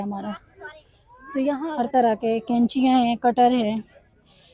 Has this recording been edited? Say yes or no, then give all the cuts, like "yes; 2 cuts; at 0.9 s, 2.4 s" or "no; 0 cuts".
yes; 1 cut; at 1.6 s